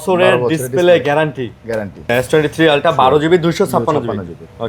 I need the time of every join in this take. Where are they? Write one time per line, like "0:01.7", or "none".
0:02.1